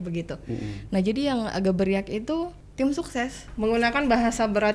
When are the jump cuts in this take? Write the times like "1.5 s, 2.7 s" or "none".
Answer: 2.6 s, 3.5 s